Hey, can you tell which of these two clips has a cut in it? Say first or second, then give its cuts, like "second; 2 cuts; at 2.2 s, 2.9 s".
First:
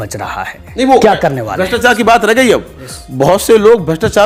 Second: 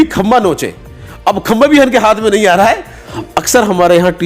second; 1 cut; at 3.1 s